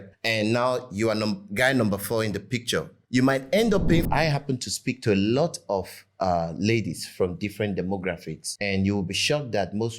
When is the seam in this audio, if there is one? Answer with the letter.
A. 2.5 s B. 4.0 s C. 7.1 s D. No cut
B